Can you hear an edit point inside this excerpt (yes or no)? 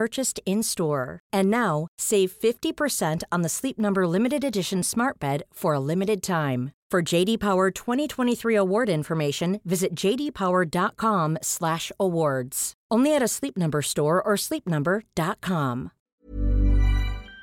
yes